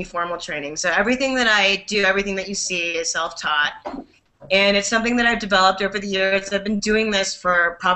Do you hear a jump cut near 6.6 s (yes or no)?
yes